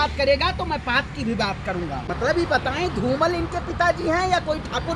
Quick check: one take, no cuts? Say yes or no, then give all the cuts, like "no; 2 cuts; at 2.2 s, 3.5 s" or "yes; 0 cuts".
no; 1 cut; at 2.1 s